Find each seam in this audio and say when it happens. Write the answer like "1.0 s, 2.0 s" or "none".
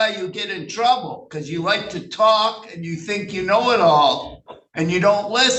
none

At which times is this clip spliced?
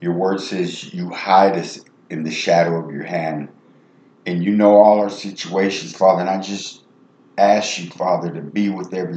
none

